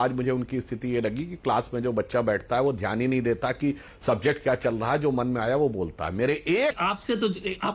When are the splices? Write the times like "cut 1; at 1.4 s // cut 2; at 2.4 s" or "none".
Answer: cut 1; at 6.1 s // cut 2; at 6.8 s